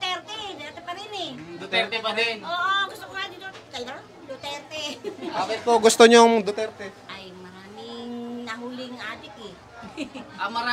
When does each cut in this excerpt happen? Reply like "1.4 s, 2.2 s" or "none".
none